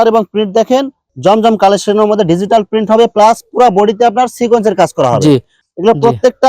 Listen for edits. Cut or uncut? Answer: cut